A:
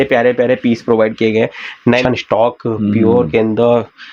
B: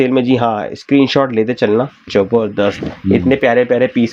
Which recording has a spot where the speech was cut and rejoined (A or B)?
A